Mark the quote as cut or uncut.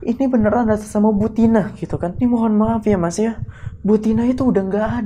cut